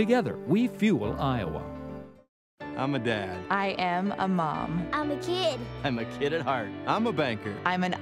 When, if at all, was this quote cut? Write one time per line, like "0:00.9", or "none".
none

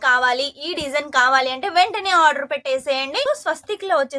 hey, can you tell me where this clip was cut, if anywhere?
0:03.2

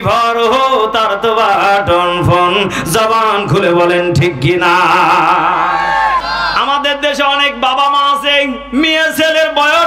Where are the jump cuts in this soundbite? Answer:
0:06.3

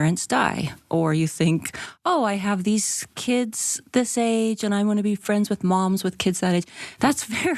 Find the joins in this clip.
none

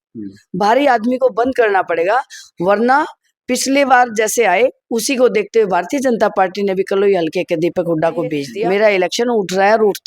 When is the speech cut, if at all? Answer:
0:08.5

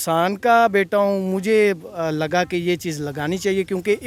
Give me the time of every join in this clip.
none

